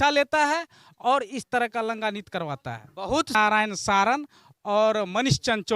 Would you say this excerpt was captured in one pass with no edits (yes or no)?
no